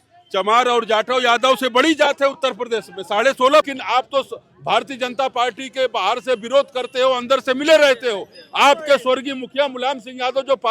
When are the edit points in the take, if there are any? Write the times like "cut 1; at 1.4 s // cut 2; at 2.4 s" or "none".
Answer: cut 1; at 3.7 s